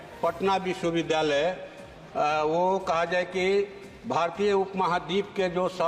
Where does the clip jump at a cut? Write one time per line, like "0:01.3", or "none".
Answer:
none